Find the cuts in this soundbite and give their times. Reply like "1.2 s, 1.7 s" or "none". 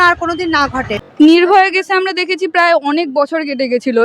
1.0 s